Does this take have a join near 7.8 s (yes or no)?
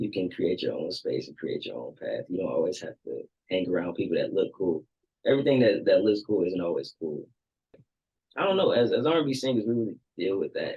yes